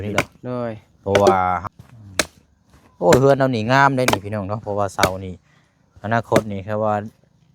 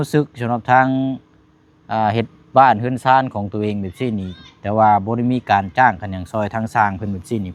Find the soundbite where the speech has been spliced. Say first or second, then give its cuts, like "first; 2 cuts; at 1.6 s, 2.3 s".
first; 1 cut; at 1.6 s